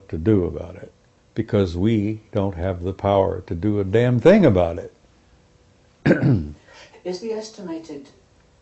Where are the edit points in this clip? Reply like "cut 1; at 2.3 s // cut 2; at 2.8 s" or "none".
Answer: none